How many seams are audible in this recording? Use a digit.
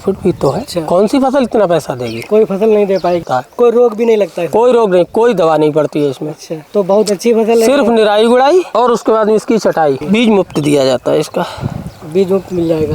2